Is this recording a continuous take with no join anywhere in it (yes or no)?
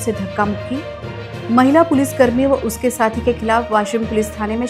yes